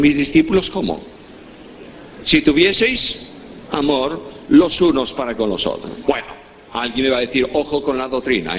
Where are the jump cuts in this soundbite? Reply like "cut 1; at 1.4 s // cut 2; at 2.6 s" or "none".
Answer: cut 1; at 6.0 s